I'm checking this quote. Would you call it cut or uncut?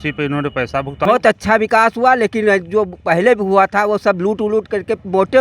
cut